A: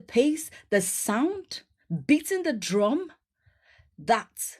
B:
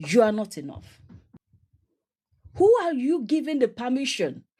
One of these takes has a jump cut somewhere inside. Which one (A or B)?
B